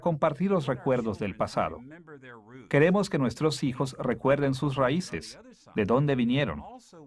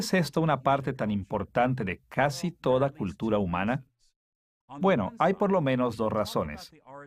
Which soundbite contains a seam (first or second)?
first